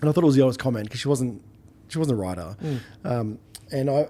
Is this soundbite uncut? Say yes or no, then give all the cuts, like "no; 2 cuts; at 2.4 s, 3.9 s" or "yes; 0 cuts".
yes; 0 cuts